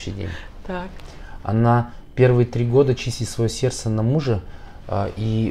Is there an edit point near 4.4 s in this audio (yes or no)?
no